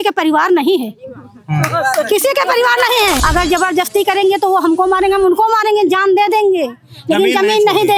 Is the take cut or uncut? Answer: cut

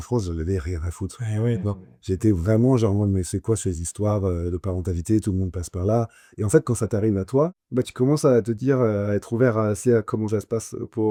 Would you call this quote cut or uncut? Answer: uncut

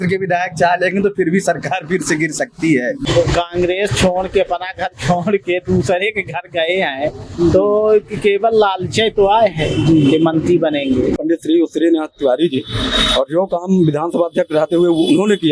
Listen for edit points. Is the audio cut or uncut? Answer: cut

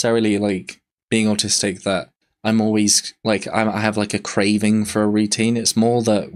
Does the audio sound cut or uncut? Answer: uncut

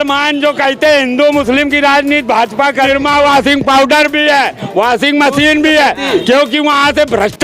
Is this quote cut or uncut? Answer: cut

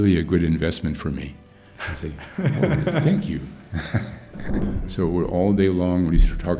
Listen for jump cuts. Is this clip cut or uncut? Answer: cut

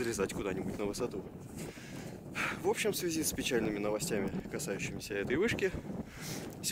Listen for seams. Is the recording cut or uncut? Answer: cut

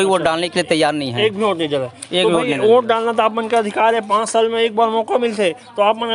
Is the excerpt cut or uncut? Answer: uncut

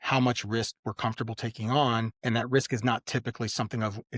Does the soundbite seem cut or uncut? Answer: uncut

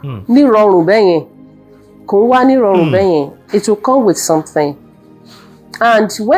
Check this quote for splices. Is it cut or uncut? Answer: uncut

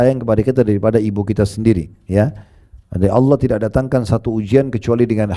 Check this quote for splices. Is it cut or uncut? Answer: uncut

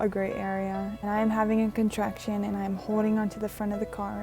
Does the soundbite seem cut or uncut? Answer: cut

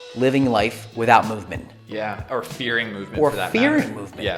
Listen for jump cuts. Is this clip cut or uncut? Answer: uncut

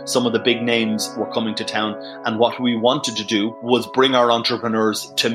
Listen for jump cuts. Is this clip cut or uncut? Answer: uncut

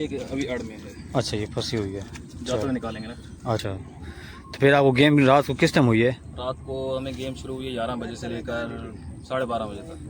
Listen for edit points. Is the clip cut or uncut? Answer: cut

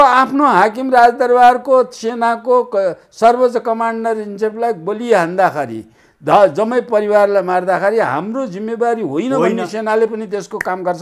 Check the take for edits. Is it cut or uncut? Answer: uncut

